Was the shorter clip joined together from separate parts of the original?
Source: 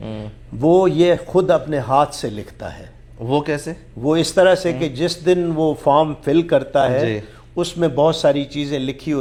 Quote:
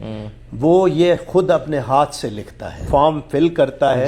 yes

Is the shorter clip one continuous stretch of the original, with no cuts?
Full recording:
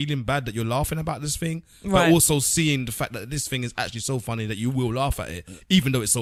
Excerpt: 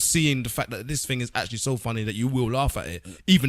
yes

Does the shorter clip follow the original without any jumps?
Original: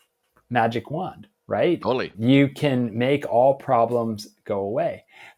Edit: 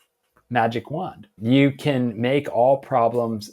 no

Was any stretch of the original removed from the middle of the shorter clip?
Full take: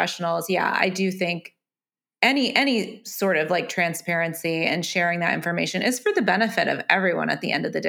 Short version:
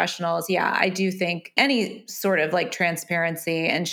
yes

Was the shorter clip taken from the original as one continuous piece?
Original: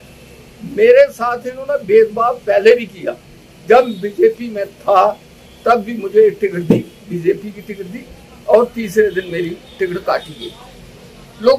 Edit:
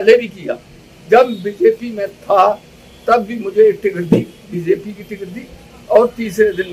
yes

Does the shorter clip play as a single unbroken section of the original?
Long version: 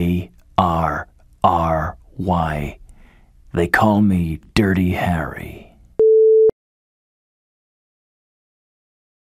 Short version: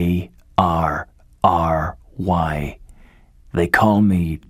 yes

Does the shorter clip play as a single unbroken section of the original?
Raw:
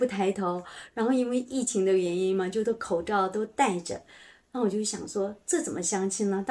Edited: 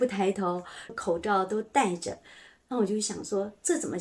no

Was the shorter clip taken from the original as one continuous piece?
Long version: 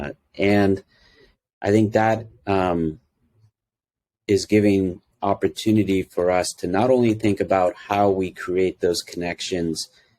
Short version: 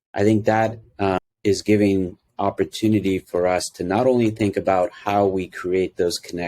no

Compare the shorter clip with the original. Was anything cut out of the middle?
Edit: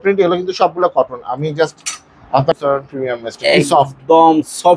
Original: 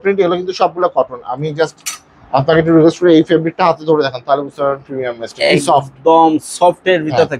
yes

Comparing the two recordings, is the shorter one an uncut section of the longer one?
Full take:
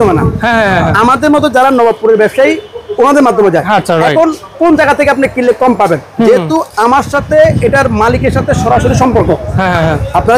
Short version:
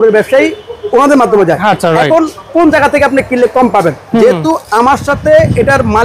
yes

